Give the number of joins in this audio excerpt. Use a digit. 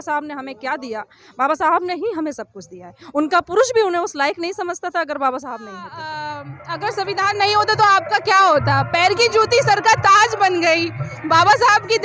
1